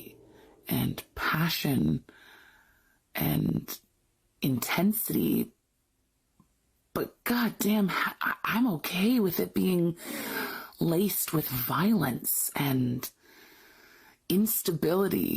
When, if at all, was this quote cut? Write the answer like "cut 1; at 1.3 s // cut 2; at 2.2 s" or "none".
cut 1; at 8.8 s